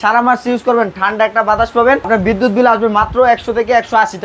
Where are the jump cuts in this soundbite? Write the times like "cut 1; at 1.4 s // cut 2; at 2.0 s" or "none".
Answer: cut 1; at 2.1 s